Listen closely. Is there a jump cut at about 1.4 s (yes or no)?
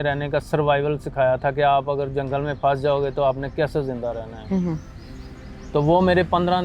no